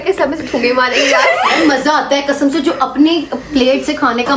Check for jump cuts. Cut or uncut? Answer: uncut